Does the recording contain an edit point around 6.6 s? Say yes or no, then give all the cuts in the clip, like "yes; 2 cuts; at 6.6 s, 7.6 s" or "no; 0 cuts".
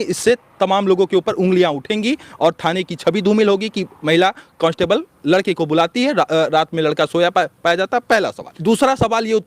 no; 1 cut; at 8.4 s